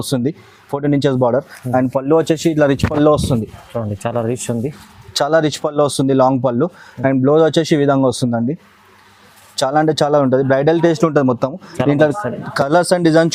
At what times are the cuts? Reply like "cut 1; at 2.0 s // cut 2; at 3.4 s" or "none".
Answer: none